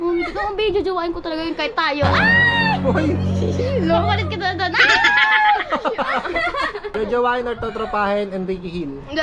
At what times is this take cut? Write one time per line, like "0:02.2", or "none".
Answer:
0:06.9